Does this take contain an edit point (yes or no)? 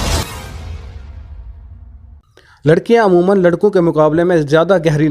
yes